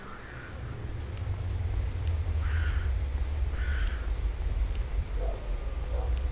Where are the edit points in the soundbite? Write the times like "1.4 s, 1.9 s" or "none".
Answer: 0.9 s